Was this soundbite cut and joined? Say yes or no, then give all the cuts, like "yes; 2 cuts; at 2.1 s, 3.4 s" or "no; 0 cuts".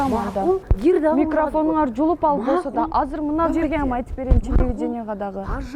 no; 0 cuts